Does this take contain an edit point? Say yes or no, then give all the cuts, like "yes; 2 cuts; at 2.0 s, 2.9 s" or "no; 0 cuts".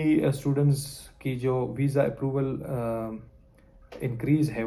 no; 0 cuts